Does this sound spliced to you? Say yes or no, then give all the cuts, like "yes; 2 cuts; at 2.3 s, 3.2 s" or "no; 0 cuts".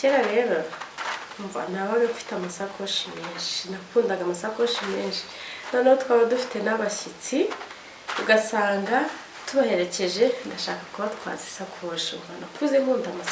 no; 0 cuts